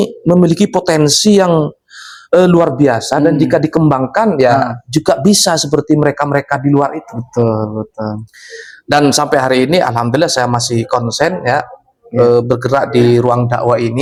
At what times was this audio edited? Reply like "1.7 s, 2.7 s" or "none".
none

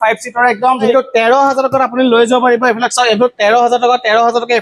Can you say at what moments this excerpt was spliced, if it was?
0.9 s

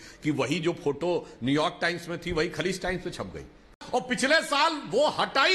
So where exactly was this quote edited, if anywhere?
3.7 s

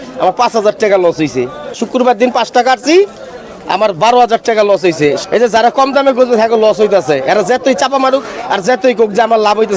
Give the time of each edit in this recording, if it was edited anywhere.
1.8 s, 5.2 s

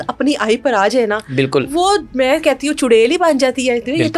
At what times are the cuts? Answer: 2.1 s

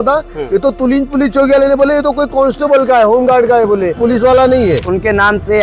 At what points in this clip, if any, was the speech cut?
4.0 s, 4.8 s

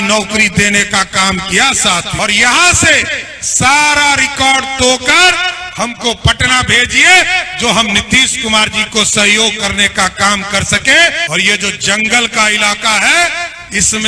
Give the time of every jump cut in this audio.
2.1 s, 11.2 s

